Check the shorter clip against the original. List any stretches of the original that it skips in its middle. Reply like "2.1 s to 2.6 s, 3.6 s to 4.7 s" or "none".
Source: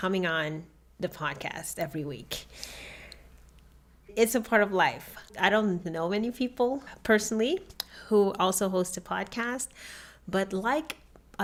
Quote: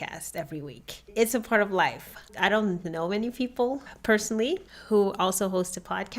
2.3 s to 3.9 s, 7.7 s to 7.9 s